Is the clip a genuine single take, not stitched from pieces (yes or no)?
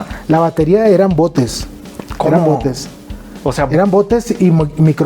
yes